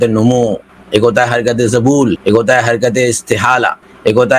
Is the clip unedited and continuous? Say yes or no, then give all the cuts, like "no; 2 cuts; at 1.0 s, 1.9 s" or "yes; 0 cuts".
no; 1 cut; at 2.2 s